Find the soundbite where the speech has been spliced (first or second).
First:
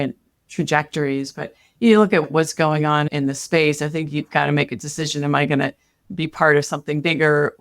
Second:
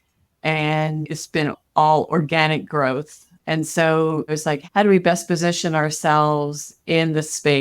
second